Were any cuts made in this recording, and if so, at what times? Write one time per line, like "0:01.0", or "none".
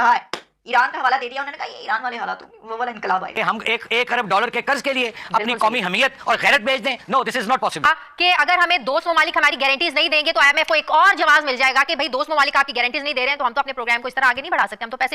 0:03.4
0:07.8